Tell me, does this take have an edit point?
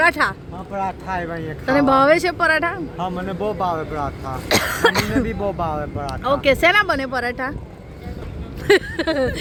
no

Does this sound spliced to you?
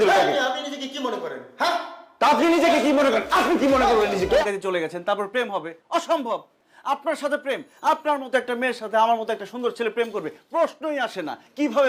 no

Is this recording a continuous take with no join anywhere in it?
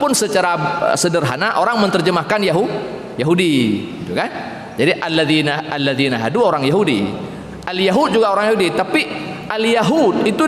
yes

